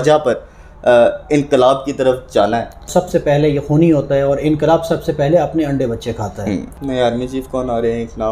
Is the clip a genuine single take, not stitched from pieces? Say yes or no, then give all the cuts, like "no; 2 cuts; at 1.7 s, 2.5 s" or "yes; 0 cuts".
no; 2 cuts; at 2.9 s, 6.7 s